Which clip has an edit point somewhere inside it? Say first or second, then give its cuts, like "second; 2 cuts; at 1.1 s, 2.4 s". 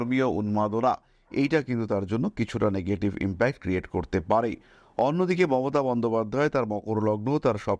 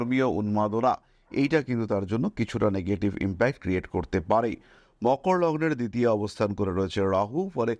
second; 1 cut; at 4.8 s